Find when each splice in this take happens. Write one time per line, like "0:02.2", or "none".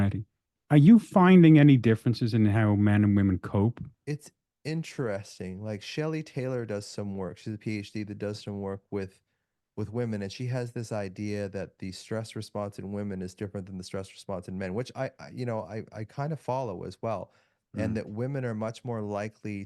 none